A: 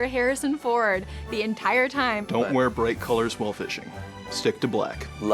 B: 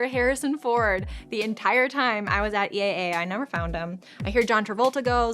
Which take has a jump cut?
A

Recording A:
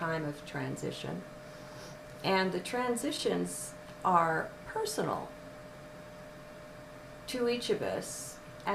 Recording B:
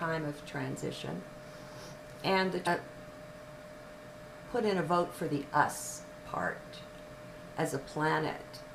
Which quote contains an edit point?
A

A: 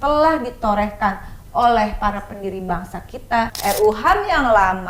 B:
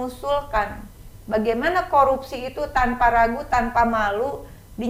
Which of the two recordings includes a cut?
A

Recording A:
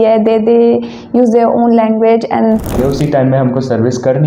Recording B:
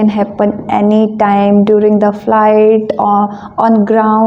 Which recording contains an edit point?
A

